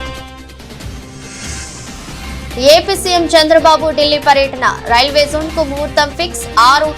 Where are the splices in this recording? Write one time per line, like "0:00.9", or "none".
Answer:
none